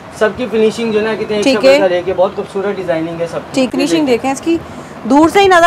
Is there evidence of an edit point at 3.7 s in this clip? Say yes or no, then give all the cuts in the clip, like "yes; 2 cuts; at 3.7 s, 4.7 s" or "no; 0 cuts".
yes; 1 cut; at 3.7 s